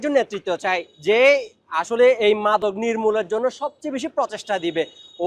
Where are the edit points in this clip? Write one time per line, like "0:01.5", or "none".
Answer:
none